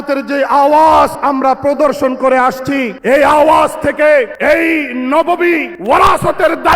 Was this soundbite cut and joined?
yes; 4 cuts; at 1.2 s, 2.9 s, 4.3 s, 5.7 s

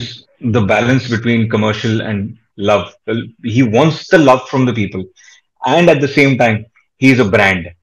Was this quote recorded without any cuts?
yes; 0 cuts

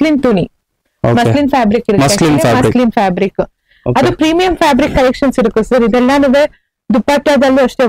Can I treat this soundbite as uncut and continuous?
yes; 0 cuts

